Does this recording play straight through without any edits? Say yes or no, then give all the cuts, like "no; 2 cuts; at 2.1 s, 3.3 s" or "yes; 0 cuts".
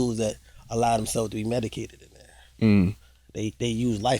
yes; 0 cuts